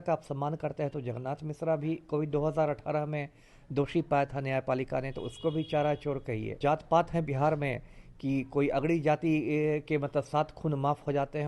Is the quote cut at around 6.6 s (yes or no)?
yes